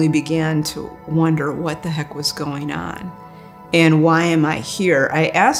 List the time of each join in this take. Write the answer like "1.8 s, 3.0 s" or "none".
none